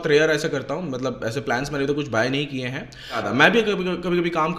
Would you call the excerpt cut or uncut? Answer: cut